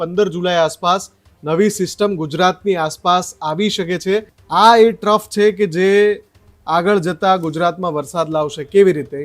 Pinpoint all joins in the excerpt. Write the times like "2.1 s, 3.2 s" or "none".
4.4 s